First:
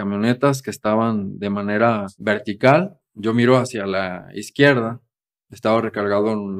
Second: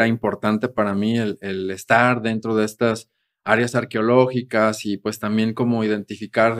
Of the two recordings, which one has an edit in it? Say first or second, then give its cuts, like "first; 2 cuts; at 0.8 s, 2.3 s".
first; 2 cuts; at 2.1 s, 3.0 s